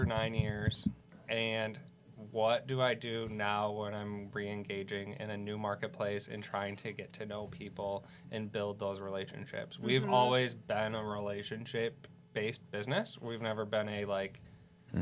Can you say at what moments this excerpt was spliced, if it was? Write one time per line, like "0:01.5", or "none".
none